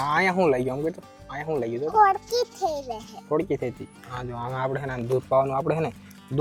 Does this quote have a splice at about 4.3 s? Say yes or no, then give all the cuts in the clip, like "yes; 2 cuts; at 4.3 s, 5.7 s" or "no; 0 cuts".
no; 0 cuts